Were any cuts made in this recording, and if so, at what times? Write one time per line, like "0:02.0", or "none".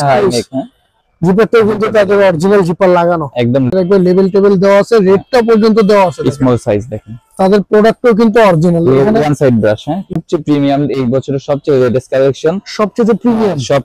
0:03.7
0:10.2

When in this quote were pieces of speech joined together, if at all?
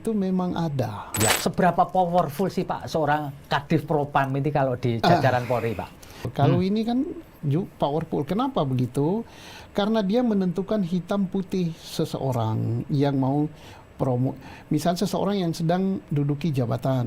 0:01.3
0:06.3

